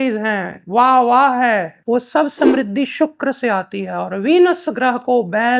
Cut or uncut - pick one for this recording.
cut